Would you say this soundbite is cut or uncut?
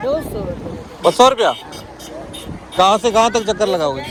uncut